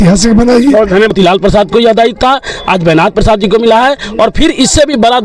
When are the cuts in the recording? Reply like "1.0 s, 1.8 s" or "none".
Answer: 1.1 s